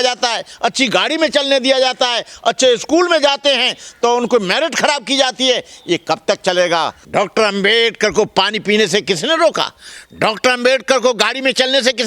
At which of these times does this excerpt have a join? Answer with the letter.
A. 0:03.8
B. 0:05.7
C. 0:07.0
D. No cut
C